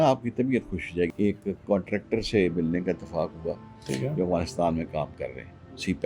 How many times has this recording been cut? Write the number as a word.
one